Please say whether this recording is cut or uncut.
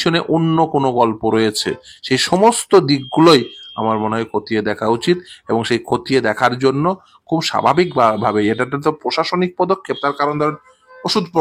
uncut